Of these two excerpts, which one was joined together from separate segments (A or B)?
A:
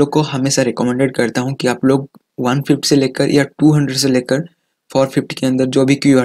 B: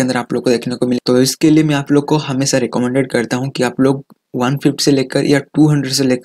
B